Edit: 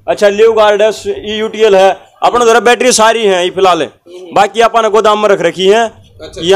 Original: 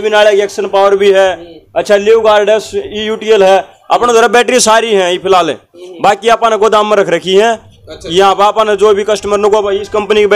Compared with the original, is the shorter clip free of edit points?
yes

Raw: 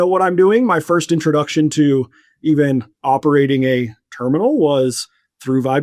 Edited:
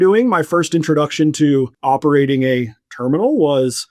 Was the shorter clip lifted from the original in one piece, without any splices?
no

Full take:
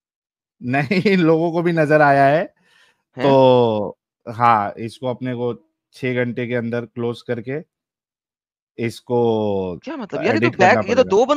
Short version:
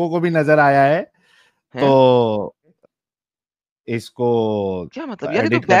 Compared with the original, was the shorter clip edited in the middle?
yes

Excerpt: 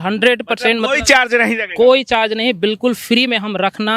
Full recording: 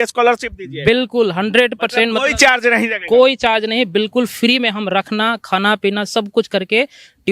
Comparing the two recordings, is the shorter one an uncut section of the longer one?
yes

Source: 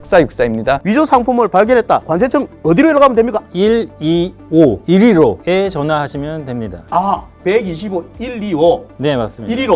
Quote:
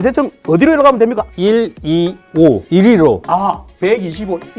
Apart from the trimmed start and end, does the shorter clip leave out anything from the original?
yes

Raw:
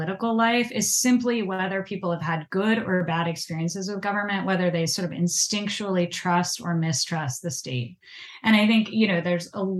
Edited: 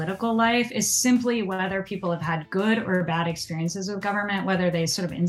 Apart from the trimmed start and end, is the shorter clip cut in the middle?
no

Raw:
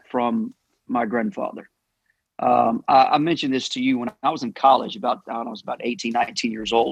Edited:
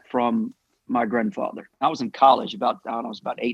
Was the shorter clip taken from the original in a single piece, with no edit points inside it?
no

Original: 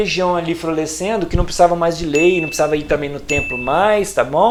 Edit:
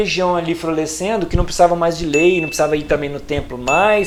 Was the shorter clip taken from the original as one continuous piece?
yes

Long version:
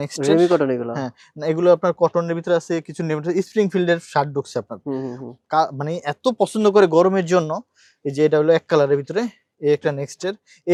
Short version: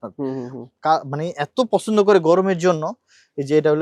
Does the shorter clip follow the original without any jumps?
yes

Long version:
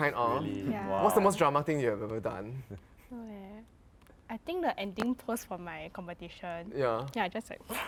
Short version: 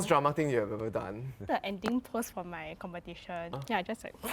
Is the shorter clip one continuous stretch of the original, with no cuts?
no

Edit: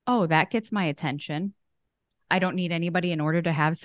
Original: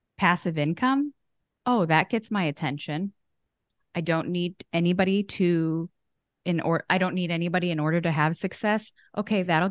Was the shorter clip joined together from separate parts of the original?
yes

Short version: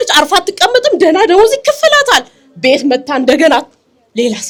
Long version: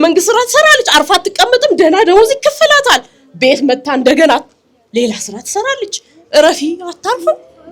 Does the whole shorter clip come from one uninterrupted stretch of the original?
yes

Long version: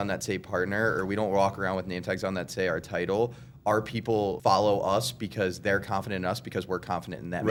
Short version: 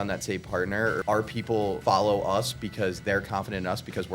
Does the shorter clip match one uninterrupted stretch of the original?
no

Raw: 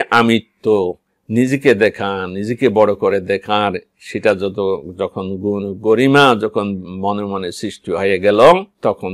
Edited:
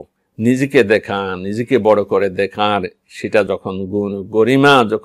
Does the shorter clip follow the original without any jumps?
no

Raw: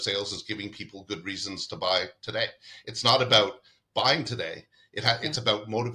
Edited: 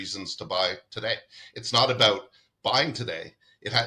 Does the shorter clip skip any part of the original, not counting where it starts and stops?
no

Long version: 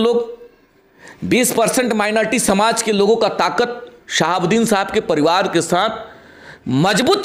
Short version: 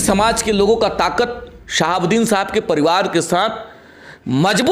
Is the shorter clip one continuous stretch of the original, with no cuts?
yes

